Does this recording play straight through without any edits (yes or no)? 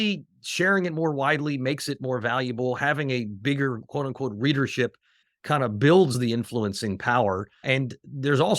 no